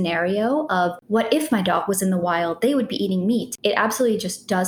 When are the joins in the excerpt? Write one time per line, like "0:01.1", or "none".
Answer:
0:01.0
0:03.5

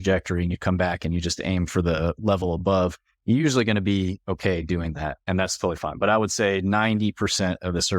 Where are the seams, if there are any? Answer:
0:05.2

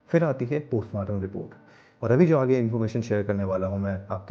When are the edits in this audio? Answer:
0:02.0

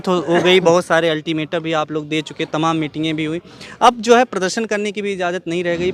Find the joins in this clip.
none

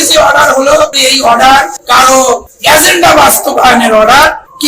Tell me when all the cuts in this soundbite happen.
0:01.0

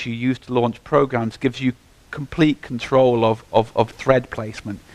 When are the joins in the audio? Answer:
0:02.7

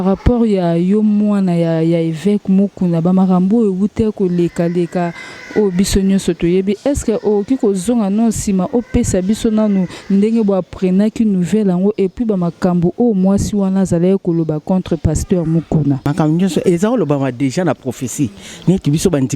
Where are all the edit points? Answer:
0:16.1

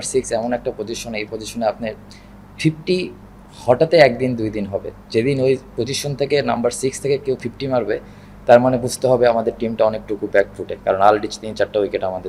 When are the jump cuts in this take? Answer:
none

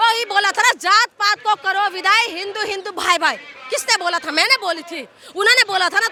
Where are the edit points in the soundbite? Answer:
none

